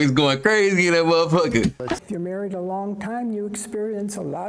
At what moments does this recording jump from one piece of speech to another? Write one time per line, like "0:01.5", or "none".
0:02.0